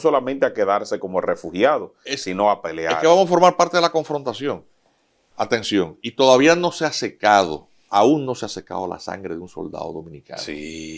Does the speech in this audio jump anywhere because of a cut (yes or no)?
no